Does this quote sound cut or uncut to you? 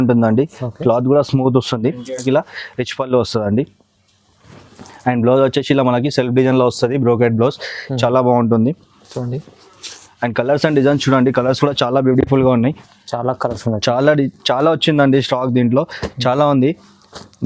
cut